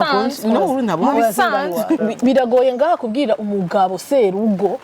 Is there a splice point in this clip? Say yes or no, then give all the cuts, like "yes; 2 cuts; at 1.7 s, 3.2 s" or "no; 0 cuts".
yes; 1 cut; at 2.0 s